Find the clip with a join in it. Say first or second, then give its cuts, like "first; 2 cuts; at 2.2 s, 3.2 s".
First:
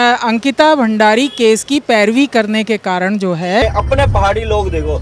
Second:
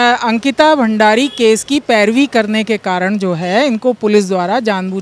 first; 1 cut; at 3.6 s